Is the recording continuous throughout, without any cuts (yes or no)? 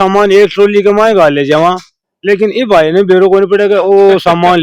yes